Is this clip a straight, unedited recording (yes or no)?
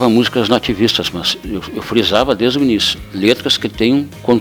yes